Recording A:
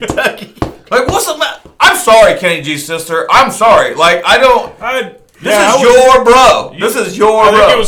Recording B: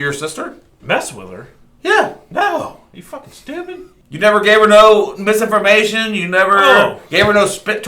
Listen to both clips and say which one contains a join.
B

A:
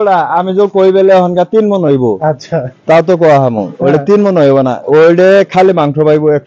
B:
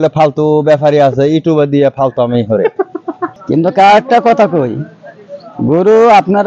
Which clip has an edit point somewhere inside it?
B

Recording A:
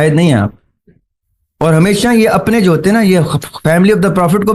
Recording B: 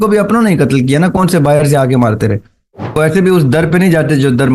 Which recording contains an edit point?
B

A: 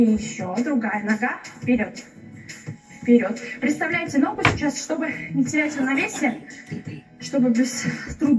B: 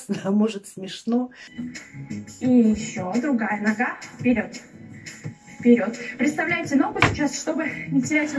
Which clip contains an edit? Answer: B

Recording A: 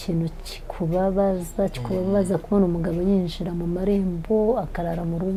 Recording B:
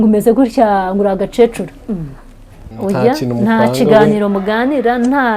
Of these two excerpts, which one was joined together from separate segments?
B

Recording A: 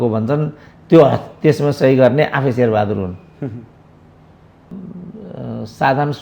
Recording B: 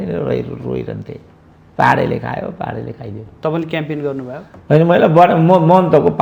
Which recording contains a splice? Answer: A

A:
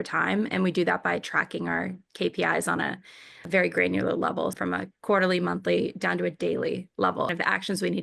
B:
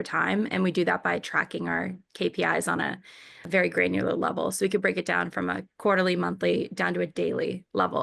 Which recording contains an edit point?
A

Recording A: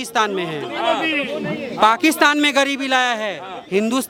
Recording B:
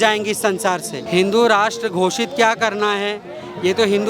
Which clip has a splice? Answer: B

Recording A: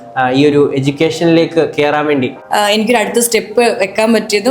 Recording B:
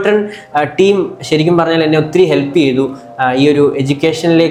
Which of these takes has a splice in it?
A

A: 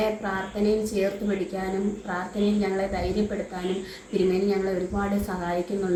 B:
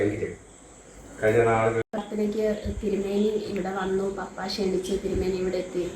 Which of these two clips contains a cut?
B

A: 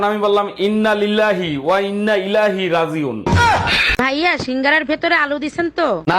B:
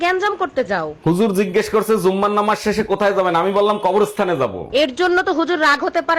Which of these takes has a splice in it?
A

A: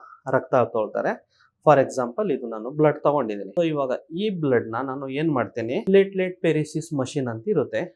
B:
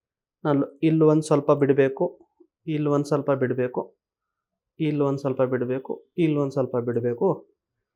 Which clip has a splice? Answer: A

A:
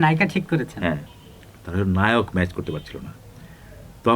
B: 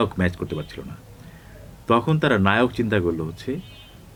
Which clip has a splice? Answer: A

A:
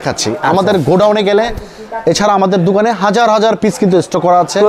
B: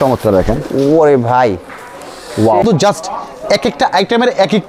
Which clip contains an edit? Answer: B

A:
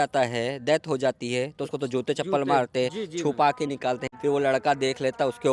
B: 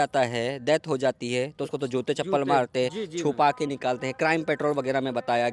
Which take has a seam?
A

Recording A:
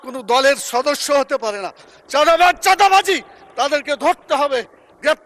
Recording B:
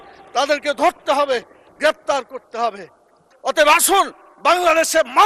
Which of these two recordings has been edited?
B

